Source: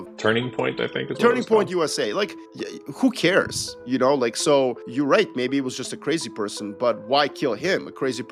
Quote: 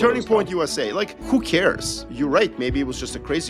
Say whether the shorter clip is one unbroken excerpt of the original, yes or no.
no